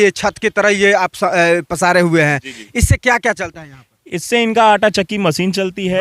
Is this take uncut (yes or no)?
yes